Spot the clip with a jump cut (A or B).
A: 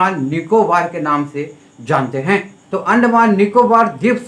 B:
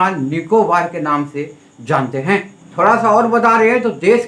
A